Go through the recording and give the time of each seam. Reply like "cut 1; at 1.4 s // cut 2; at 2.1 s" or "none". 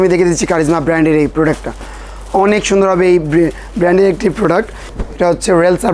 cut 1; at 4.8 s